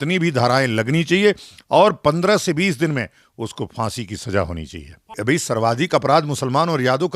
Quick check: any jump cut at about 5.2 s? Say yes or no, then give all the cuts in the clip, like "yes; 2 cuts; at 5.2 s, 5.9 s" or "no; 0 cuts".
yes; 1 cut; at 5.2 s